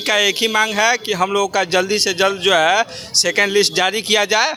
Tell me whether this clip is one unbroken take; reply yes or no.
yes